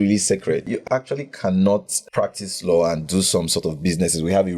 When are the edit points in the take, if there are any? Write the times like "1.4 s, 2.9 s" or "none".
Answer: 0.8 s, 2.0 s